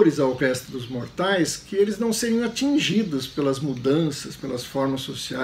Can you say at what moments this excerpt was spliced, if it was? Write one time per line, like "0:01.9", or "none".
none